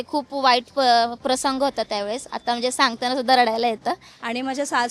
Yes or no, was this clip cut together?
yes